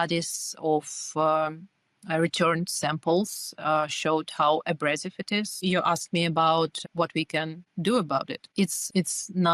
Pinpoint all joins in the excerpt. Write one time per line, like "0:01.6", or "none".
none